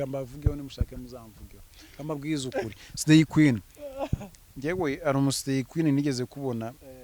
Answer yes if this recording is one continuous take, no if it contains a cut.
yes